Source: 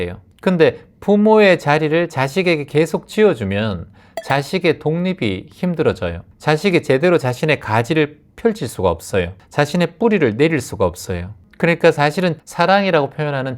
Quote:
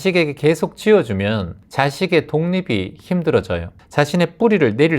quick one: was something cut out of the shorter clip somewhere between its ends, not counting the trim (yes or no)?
yes